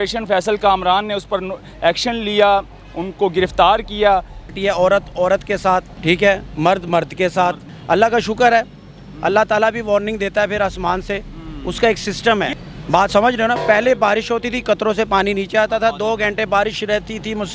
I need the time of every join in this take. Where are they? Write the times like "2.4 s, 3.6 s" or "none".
4.5 s, 7.7 s, 12.5 s